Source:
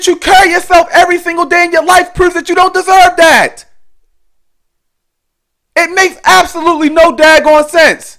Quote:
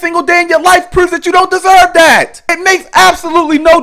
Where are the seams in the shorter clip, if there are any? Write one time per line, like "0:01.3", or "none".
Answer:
0:02.4